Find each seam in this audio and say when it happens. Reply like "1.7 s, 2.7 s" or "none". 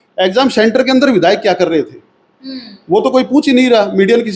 none